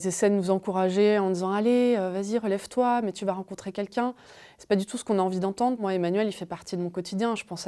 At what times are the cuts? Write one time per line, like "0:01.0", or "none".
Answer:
0:05.8